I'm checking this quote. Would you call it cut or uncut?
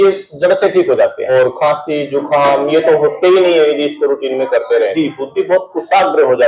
cut